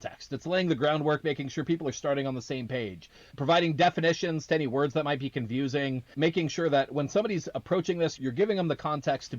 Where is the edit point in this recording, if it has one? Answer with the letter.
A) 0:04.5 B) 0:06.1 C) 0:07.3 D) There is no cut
B